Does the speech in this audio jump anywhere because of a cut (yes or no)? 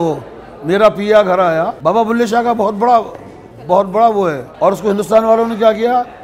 yes